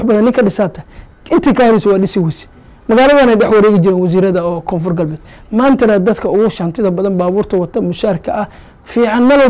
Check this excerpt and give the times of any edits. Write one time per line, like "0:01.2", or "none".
none